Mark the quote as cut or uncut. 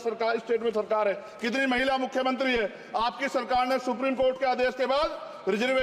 uncut